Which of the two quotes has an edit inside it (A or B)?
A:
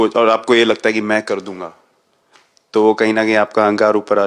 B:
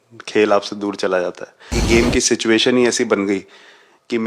B